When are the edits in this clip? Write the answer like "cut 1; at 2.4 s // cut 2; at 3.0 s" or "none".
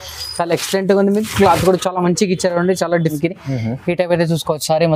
cut 1; at 3.2 s